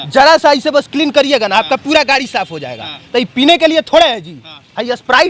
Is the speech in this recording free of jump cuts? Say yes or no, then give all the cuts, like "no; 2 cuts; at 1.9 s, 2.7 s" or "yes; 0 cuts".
yes; 0 cuts